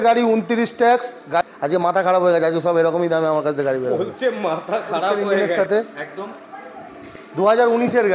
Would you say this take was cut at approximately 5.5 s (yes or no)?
yes